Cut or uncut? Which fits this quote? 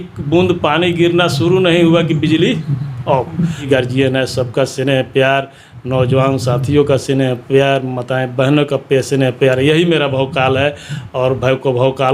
cut